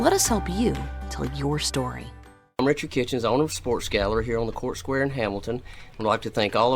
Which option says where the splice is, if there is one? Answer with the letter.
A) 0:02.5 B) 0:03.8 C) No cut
A